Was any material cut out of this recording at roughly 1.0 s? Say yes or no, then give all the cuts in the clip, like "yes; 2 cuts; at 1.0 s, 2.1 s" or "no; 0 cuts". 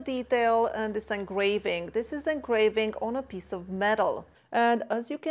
no; 1 cut; at 4.3 s